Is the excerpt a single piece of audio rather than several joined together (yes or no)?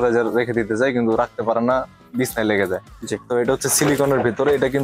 yes